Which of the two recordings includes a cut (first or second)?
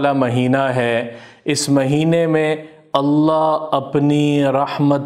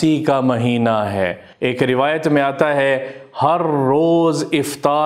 second